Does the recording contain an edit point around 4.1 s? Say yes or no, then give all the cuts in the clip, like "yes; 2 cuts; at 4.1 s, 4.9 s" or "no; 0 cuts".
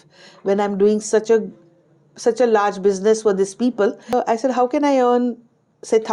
yes; 1 cut; at 4.1 s